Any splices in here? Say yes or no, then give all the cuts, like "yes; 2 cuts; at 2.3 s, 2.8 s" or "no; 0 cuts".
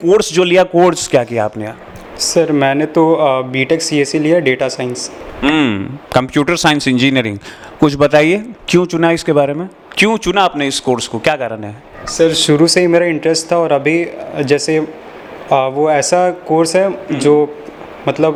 no; 0 cuts